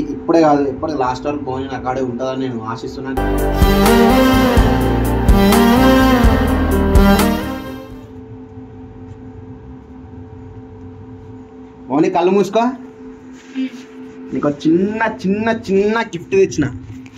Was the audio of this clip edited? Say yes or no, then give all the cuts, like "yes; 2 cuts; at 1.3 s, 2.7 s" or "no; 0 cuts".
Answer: no; 0 cuts